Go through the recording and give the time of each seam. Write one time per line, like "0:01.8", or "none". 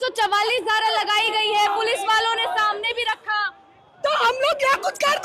none